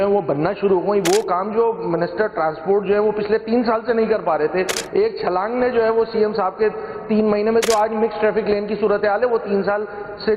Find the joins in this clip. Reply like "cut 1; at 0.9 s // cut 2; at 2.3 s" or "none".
none